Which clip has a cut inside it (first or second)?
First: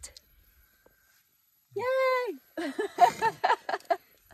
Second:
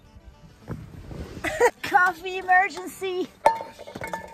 second